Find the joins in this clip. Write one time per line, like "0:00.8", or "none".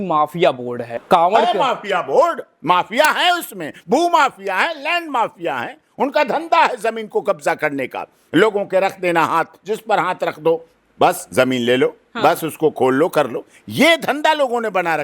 0:01.0